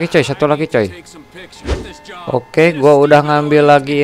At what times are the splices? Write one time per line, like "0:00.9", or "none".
0:01.5